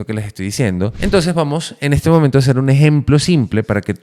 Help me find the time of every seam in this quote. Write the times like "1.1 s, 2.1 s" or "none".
0.9 s